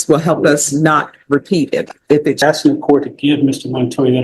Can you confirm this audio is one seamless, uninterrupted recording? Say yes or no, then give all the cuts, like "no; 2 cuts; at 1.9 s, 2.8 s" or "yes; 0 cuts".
no; 1 cut; at 2.4 s